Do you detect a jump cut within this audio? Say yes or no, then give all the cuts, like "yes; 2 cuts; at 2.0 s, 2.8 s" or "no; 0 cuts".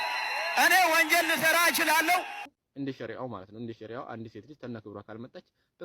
yes; 1 cut; at 2.5 s